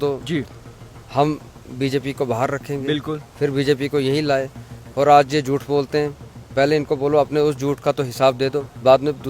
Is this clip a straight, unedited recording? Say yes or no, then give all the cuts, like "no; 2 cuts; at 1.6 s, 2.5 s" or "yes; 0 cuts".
yes; 0 cuts